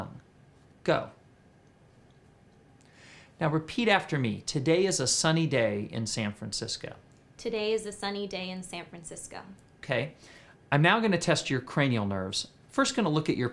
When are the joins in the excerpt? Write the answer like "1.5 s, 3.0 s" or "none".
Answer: 11.7 s

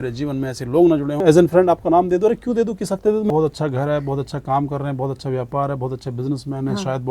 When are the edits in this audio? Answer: 1.2 s, 3.3 s

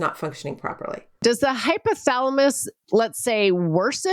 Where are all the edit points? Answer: 1.2 s

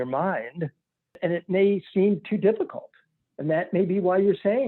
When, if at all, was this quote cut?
1.2 s

